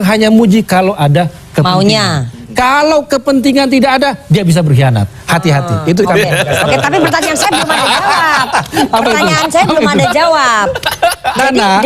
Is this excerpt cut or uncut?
uncut